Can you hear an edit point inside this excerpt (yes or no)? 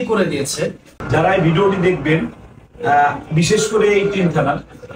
yes